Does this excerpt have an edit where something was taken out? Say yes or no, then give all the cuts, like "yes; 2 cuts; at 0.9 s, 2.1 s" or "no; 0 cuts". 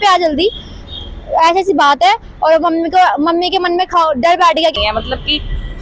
yes; 1 cut; at 4.7 s